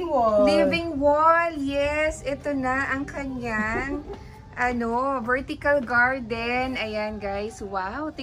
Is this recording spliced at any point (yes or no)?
no